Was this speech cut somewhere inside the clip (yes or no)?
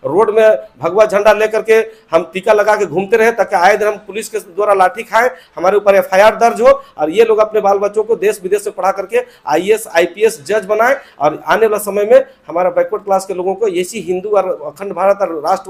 no